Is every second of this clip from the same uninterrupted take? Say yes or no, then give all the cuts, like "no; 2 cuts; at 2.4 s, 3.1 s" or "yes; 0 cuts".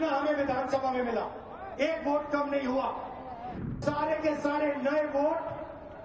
no; 1 cut; at 3.7 s